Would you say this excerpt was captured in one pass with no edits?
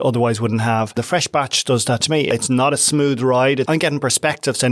no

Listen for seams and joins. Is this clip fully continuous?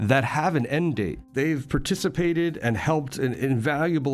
no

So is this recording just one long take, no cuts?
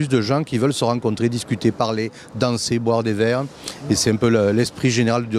no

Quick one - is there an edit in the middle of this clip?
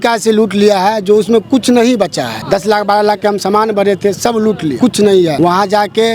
yes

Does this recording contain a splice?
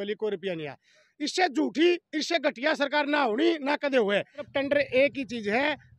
yes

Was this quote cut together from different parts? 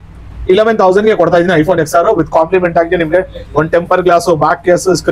no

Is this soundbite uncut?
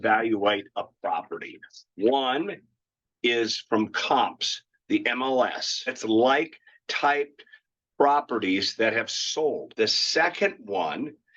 no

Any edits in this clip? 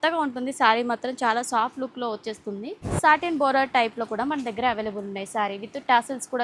yes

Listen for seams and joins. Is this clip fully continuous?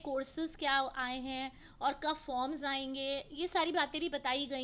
yes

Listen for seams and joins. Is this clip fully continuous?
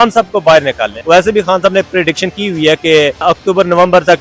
no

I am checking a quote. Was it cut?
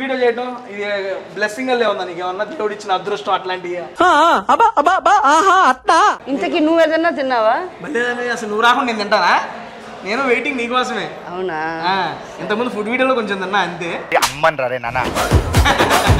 yes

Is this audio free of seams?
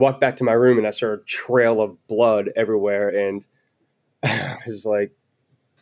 yes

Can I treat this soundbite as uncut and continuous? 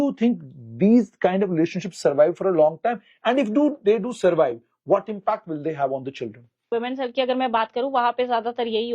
no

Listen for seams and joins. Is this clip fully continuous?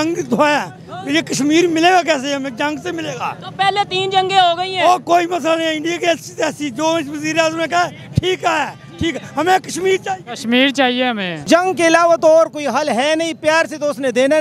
no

